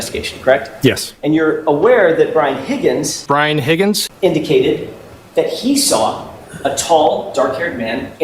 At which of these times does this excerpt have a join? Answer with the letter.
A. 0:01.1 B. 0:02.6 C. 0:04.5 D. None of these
A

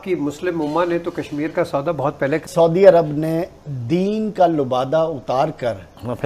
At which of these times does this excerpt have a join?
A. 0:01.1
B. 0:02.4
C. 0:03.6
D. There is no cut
B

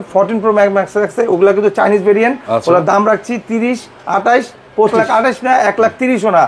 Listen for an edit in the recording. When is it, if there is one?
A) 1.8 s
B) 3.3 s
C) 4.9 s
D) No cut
C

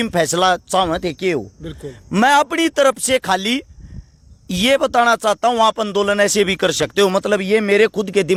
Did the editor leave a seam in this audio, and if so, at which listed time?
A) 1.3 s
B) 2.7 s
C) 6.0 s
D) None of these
D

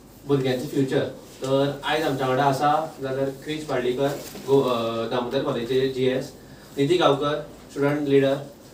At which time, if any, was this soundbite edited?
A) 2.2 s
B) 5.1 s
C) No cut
C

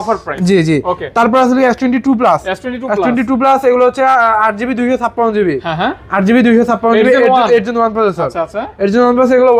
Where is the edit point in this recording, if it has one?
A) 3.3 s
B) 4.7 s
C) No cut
C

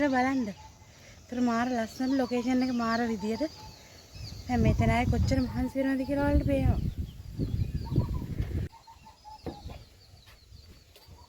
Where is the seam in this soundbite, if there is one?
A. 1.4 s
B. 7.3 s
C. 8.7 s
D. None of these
C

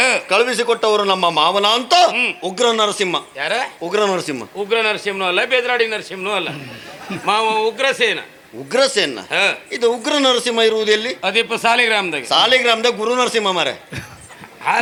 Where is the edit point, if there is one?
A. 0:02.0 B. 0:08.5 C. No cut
C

